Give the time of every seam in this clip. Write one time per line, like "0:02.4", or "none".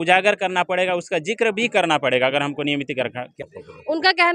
0:03.4